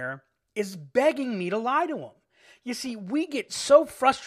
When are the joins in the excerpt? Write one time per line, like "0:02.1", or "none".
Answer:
none